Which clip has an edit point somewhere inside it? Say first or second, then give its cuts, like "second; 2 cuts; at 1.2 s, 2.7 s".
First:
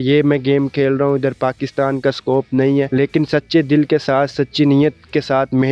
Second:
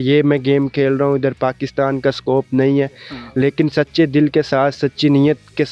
first; 1 cut; at 2.9 s